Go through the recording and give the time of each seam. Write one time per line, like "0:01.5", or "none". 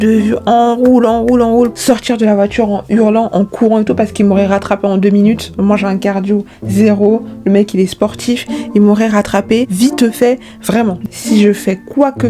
0:01.7
0:11.0